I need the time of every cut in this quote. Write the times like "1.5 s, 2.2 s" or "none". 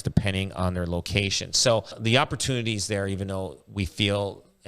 2.0 s